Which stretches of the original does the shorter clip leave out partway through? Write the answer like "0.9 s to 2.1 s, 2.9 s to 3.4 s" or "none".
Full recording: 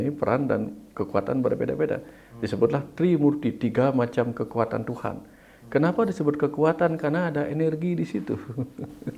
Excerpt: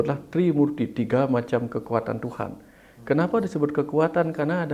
none